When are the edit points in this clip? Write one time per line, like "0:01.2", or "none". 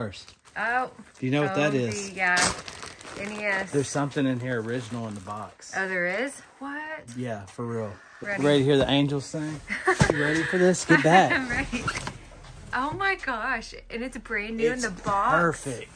0:08.1
0:10.1